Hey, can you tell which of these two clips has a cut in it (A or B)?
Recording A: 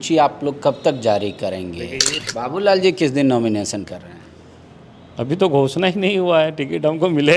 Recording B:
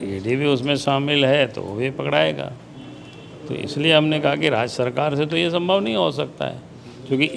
A